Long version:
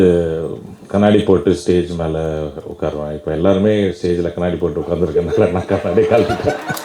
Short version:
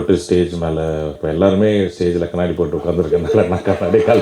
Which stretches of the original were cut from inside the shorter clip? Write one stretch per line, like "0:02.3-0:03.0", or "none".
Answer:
0:02.5-0:03.2